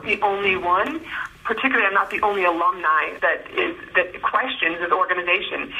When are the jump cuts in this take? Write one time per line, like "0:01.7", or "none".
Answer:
0:03.1

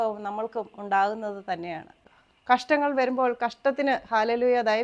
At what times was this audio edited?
0:02.0

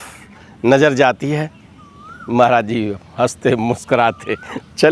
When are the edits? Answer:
none

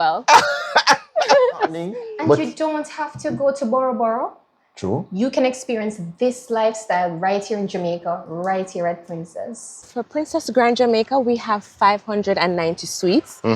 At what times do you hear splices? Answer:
0:02.1
0:09.9

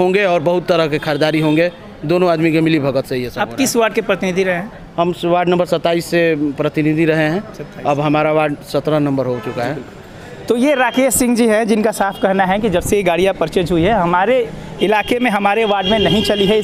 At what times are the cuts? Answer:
none

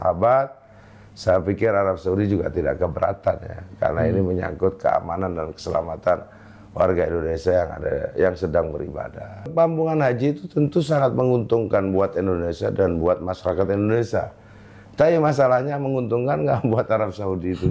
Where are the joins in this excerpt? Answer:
0:09.5

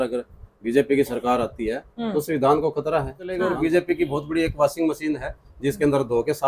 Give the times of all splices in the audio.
0:03.4

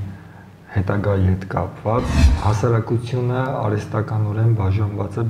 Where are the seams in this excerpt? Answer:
0:02.2

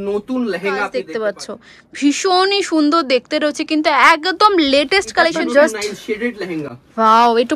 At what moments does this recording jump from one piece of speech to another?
0:01.0
0:05.4

